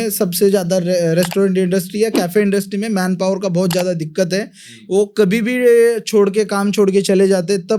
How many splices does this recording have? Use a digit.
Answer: 0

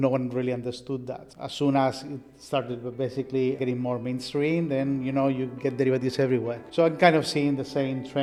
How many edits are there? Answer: 0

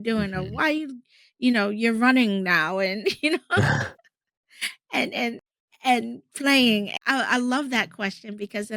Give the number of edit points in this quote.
2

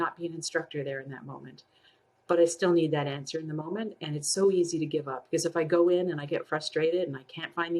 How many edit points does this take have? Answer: 0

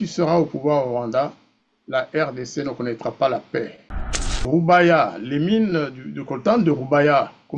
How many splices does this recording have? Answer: 1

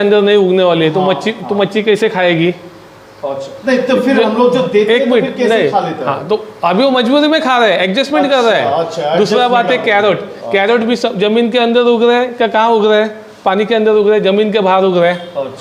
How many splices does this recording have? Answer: 0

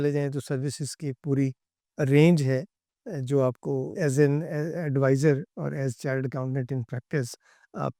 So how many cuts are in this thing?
0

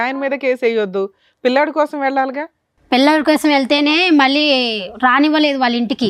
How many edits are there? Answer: 0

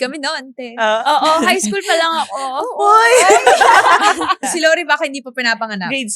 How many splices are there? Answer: 1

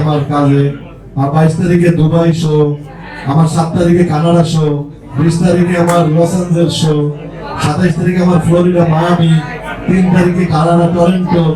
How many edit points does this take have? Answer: 0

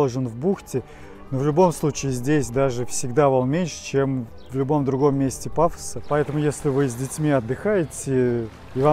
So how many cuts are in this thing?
1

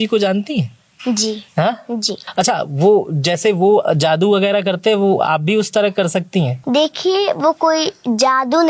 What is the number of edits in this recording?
2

